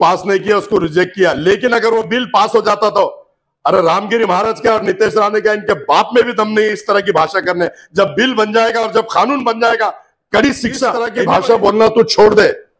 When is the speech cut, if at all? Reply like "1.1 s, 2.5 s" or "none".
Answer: 11.1 s